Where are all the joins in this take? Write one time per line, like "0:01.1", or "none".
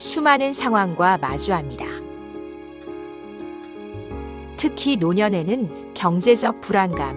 none